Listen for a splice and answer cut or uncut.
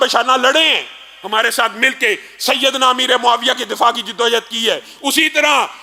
uncut